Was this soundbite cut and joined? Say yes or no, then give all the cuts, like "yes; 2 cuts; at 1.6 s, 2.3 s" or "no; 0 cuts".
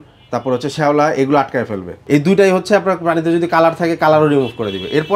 yes; 1 cut; at 1.9 s